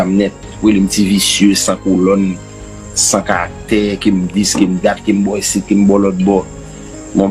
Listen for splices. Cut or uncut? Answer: uncut